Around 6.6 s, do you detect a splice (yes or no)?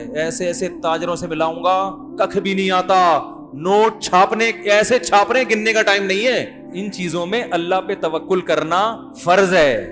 yes